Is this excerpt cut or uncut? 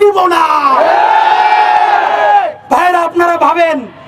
uncut